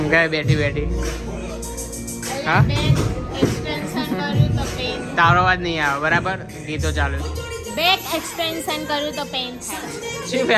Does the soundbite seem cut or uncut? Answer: uncut